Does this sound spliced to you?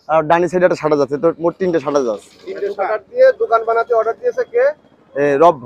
no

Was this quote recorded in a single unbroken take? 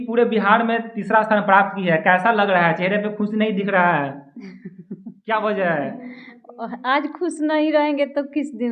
yes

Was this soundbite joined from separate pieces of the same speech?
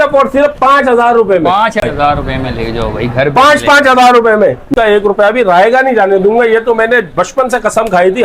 yes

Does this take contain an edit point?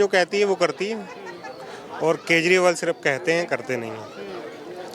no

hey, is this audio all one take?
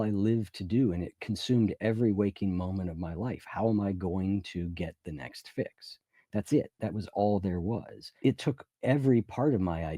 no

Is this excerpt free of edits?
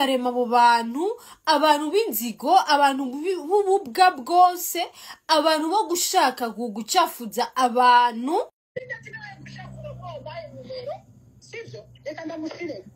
no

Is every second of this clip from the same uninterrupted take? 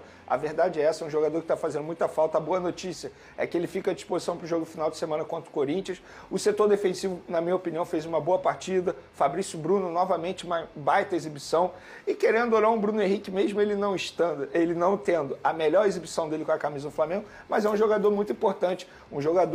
yes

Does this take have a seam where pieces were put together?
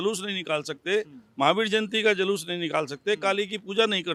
no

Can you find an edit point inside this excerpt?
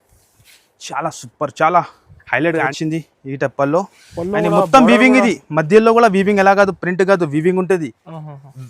yes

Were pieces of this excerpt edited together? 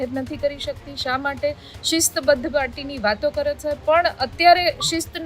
no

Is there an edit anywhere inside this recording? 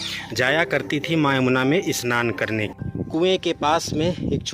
yes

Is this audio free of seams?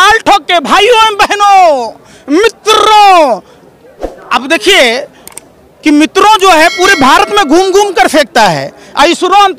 yes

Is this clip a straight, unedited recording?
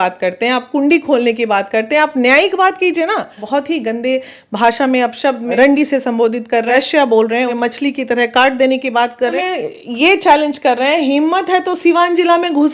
no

